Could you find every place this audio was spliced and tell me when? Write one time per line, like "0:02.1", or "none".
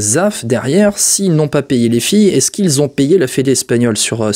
none